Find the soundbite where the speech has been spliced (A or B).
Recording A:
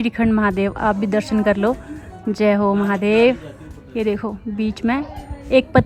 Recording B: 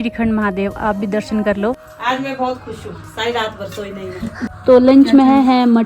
B